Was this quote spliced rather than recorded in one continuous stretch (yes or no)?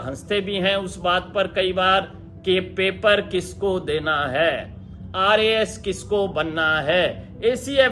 no